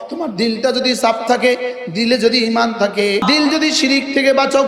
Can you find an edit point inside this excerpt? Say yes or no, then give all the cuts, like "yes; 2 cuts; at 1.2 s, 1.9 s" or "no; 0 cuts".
yes; 1 cut; at 3.2 s